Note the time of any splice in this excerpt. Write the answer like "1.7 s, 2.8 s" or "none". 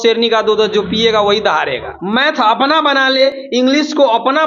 1.9 s